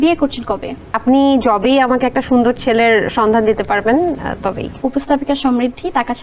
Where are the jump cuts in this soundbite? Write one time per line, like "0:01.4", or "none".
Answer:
0:00.9
0:04.8